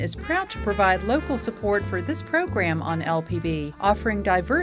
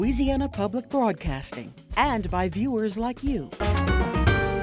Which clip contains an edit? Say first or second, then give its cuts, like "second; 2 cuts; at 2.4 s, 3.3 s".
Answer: second; 1 cut; at 3.5 s